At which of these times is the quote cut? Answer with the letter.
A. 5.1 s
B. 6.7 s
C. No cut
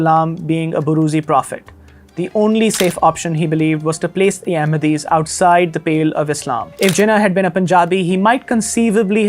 B